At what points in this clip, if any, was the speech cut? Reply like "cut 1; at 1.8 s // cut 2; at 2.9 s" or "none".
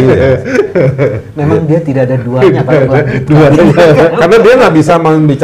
none